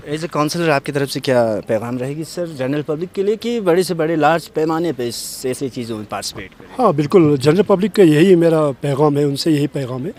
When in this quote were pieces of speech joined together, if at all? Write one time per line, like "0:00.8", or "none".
none